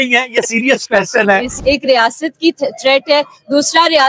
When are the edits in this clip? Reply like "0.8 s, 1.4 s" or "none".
1.5 s

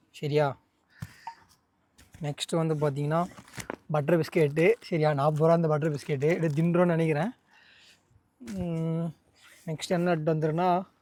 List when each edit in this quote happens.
none

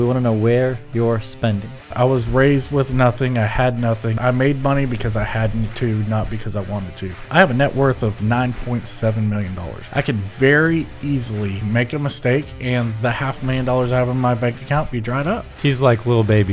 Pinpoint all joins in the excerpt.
1.8 s, 4.1 s, 7.3 s, 9.8 s, 11.6 s, 15.5 s

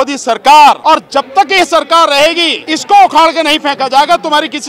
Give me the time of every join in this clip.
0.8 s, 2.6 s

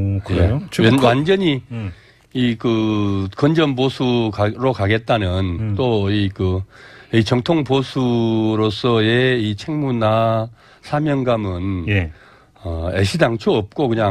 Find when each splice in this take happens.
7.6 s

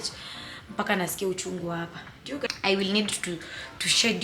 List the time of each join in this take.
2.5 s

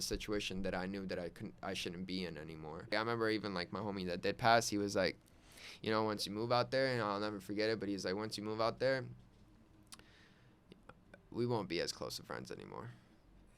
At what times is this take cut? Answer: 2.9 s

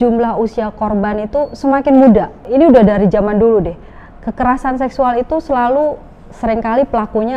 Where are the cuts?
2.4 s

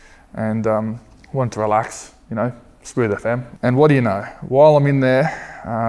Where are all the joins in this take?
3.5 s

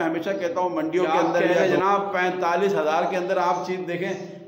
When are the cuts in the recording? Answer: 1.6 s

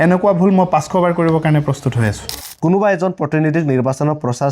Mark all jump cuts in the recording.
2.4 s

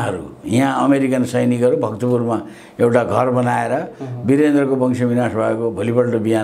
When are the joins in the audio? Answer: none

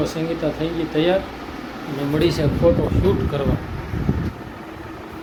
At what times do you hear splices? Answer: none

